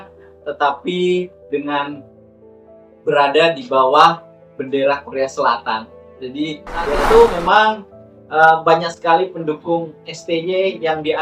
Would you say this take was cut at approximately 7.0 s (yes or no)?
yes